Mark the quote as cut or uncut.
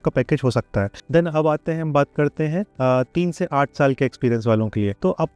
uncut